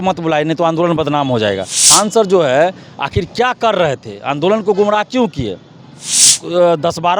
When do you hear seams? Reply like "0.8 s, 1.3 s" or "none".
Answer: 1.8 s, 6.3 s